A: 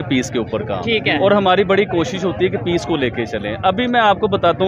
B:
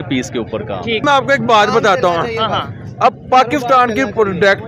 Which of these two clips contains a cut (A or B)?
B